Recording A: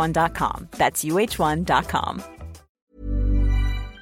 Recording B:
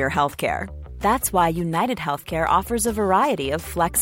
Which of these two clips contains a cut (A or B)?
A